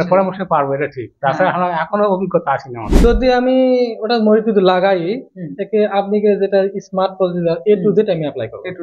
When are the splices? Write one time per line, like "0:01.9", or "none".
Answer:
0:03.0